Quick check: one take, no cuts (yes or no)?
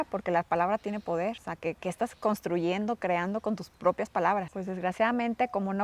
no